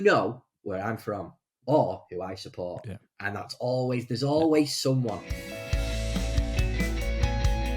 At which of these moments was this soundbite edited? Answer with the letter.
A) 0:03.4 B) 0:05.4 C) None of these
B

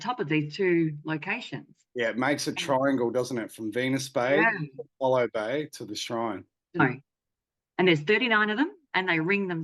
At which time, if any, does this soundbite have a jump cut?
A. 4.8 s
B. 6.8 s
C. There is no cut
B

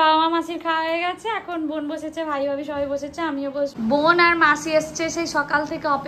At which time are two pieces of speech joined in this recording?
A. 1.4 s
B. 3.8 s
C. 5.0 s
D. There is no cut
B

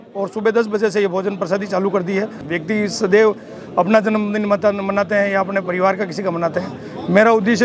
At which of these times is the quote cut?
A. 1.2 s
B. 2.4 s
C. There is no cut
B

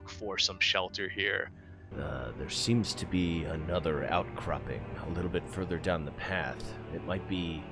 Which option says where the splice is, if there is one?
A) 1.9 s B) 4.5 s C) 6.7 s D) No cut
A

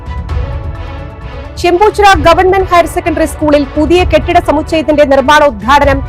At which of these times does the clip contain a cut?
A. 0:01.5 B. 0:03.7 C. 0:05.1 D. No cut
A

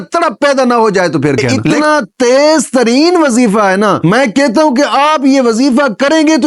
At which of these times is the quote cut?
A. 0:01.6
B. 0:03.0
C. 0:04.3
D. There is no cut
A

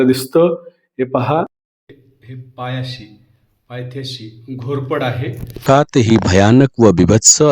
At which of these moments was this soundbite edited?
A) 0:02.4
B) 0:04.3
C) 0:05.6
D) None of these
C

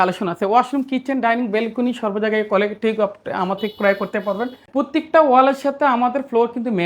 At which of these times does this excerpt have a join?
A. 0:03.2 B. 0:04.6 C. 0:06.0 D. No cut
B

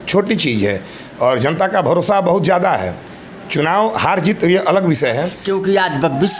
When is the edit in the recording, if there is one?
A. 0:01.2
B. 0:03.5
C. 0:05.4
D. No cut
C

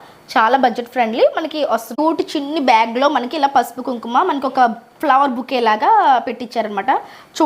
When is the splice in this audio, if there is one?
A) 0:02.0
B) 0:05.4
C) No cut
A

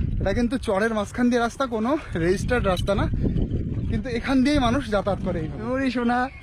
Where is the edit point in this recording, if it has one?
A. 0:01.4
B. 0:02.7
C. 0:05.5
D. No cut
C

